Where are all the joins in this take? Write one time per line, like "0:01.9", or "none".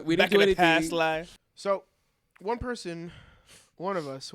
0:01.3